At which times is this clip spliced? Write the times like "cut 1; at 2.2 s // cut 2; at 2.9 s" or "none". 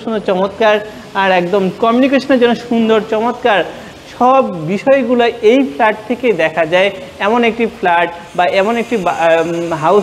none